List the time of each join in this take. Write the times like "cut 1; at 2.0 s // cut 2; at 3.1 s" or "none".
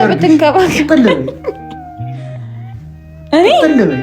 cut 1; at 1.6 s // cut 2; at 3.1 s